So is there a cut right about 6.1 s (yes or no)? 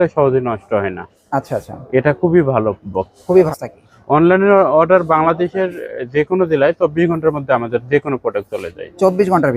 no